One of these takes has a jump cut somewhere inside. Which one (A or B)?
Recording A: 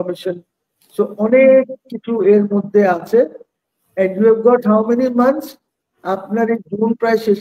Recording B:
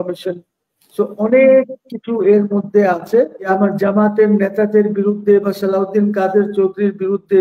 B